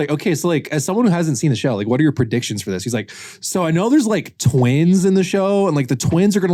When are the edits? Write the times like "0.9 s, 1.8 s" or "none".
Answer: none